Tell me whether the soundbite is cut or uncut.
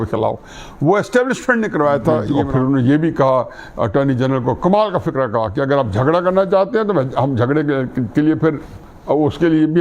cut